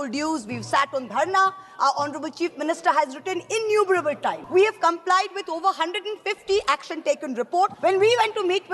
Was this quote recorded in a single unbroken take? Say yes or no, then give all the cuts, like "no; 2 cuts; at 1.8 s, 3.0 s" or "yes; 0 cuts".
no; 2 cuts; at 4.4 s, 7.7 s